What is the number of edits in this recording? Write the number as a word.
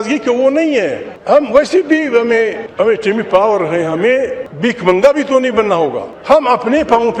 four